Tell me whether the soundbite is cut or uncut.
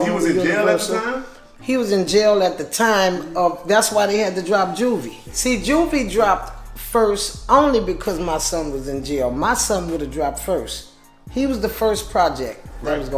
cut